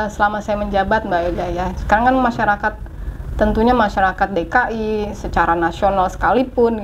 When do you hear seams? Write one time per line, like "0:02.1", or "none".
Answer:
none